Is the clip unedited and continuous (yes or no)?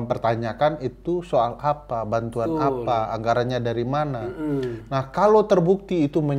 yes